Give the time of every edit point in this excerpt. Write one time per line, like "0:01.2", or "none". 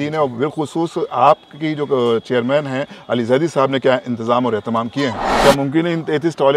0:05.3